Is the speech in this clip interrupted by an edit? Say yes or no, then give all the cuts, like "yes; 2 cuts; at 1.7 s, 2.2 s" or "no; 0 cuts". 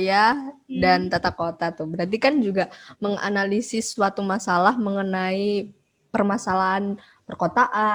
no; 0 cuts